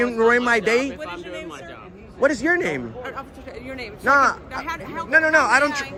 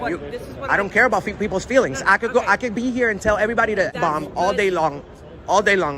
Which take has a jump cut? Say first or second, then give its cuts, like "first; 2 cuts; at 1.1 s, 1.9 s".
second; 1 cut; at 3.9 s